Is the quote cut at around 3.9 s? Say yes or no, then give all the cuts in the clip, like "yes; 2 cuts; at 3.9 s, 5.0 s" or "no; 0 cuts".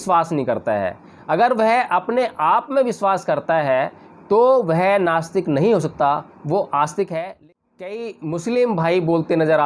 no; 1 cut; at 7.3 s